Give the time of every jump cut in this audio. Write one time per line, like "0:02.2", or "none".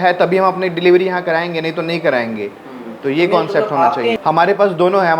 0:04.2